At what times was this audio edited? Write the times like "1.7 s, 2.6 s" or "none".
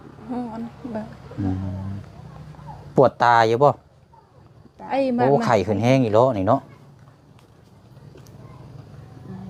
none